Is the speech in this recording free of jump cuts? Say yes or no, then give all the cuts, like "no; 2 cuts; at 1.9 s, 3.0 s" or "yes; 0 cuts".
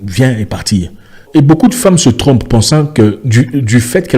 no; 1 cut; at 1.2 s